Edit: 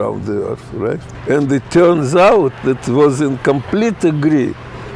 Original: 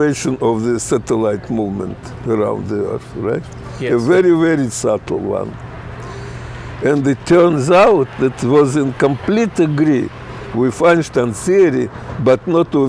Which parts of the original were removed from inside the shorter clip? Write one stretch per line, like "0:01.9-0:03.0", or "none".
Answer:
0:03.5-0:06.7